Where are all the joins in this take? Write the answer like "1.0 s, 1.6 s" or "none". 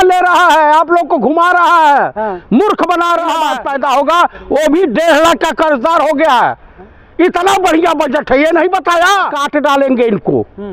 3.5 s, 9.4 s